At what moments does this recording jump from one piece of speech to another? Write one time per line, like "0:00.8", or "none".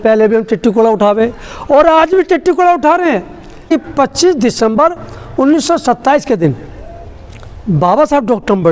0:03.7